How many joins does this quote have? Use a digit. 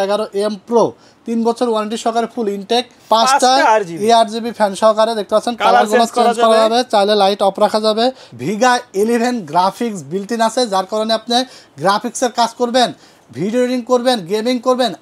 2